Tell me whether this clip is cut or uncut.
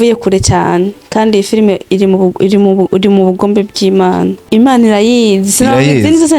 cut